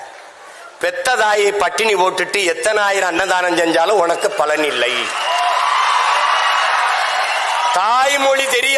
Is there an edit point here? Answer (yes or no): no